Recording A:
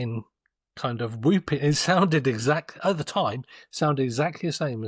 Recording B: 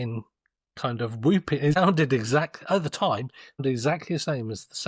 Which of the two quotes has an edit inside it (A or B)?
B